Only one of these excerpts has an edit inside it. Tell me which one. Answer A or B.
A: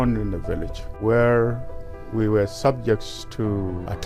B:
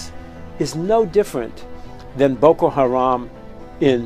A